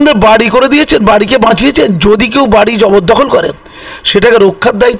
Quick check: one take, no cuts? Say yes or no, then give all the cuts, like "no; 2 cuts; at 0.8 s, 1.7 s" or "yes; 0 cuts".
yes; 0 cuts